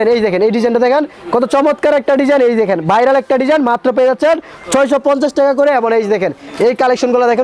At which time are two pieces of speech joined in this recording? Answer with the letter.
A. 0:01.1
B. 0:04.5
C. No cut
C